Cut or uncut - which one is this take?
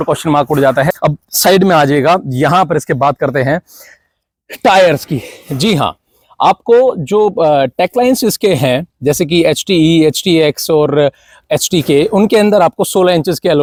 uncut